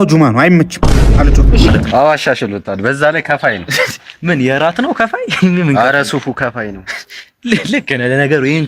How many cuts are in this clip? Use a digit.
1